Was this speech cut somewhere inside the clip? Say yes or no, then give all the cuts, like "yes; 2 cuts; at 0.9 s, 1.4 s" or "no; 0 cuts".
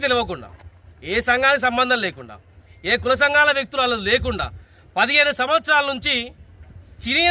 no; 0 cuts